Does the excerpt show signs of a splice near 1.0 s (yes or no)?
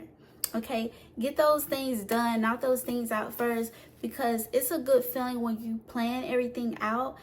no